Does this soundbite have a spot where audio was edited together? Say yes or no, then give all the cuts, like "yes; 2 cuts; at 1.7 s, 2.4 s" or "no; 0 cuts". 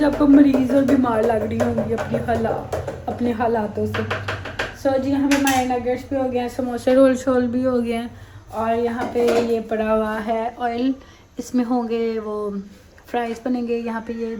no; 0 cuts